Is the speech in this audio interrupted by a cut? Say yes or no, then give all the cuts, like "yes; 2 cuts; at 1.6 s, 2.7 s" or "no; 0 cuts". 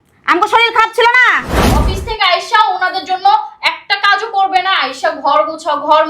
yes; 1 cut; at 1.9 s